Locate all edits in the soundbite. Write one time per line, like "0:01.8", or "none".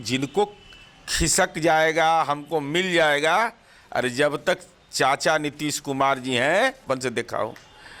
0:06.8